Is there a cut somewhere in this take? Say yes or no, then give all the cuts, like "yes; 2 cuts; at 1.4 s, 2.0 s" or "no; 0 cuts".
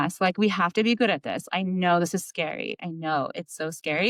no; 0 cuts